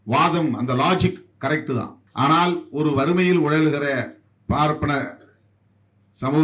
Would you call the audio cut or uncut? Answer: cut